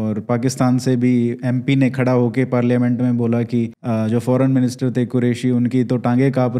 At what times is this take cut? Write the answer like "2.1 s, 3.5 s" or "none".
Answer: 3.8 s